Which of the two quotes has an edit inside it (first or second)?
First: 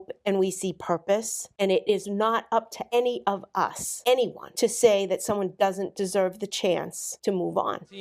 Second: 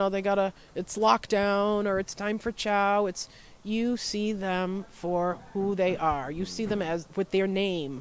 first